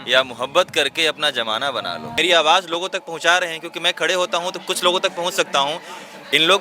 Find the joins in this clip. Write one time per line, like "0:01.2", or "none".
0:02.1